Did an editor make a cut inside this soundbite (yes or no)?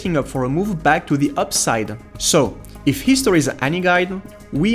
no